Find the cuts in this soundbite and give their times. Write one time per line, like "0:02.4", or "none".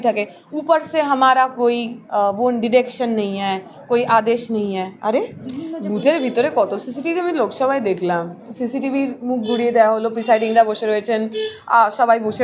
0:05.4